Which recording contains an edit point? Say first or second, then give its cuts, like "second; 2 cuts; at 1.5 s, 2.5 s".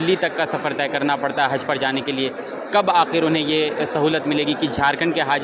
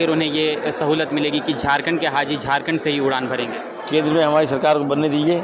second; 1 cut; at 3.7 s